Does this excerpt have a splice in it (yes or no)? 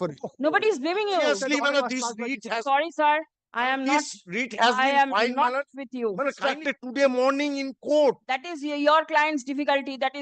yes